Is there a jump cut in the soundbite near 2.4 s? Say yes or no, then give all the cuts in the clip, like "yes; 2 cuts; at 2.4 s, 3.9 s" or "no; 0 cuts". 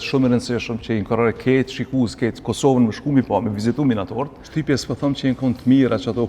no; 1 cut; at 4.4 s